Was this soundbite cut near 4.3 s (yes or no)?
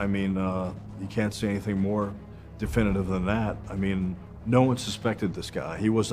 yes